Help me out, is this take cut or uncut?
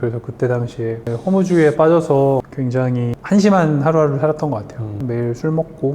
cut